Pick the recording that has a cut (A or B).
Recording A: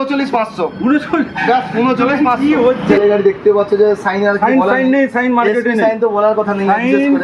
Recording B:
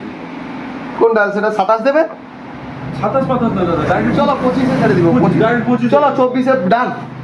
A